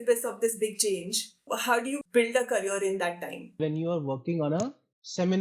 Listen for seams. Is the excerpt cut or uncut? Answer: cut